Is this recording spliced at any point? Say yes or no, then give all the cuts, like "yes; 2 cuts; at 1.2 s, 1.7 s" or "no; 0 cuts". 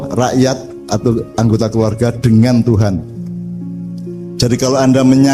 yes; 2 cuts; at 3.1 s, 4.4 s